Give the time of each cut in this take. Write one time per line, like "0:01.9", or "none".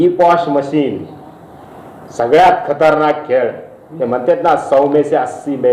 none